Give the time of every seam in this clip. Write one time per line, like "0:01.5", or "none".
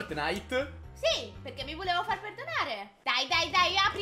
0:02.9